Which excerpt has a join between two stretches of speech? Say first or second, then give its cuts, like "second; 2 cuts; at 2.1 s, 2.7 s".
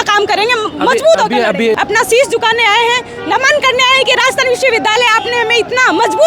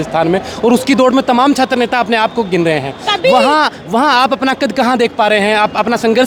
first; 1 cut; at 1.8 s